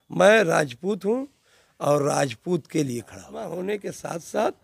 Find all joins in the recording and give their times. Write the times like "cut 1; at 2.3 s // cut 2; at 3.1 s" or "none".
cut 1; at 3.4 s